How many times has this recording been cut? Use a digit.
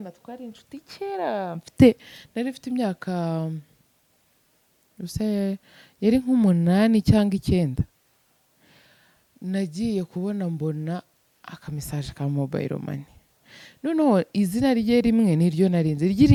0